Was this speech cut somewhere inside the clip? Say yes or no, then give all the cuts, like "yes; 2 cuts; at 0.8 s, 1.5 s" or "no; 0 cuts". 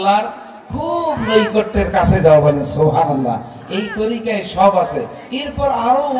no; 0 cuts